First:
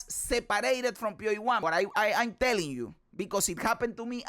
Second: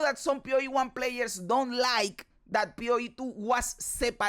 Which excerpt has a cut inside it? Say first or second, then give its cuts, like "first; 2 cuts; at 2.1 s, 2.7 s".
first; 1 cut; at 1.6 s